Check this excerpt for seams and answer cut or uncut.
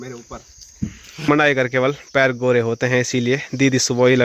cut